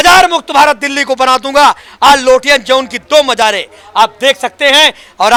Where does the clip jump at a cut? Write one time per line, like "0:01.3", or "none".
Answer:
none